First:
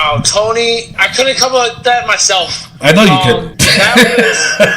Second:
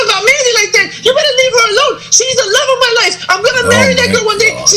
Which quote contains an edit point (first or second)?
first